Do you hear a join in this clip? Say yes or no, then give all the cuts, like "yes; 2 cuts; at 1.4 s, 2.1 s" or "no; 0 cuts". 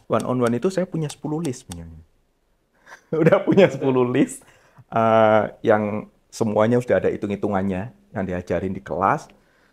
no; 0 cuts